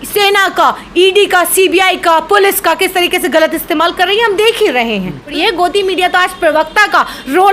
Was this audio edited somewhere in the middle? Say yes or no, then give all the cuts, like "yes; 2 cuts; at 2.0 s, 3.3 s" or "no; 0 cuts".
yes; 1 cut; at 5.4 s